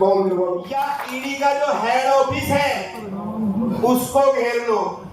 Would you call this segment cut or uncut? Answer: cut